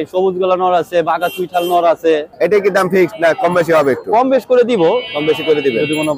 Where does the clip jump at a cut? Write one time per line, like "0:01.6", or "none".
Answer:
0:02.3